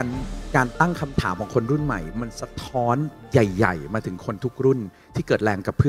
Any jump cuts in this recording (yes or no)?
no